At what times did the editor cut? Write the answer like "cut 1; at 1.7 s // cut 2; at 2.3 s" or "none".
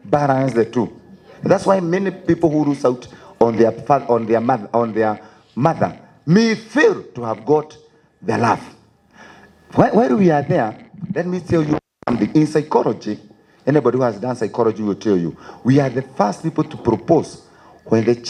none